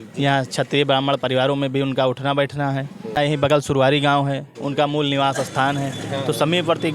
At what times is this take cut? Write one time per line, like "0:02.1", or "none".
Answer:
0:03.3